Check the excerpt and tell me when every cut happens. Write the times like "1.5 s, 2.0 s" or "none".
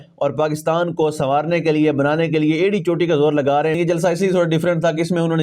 3.8 s